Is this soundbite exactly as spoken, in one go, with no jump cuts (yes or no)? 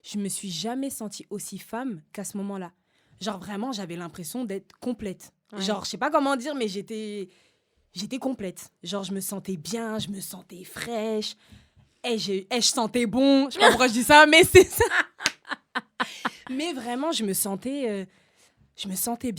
yes